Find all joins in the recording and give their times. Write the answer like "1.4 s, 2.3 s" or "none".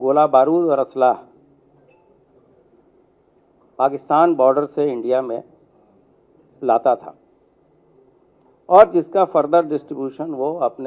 none